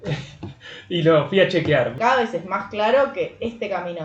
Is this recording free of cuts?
no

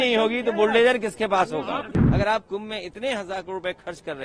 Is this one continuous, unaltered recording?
no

